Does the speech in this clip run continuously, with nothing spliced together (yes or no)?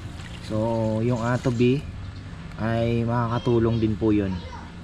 yes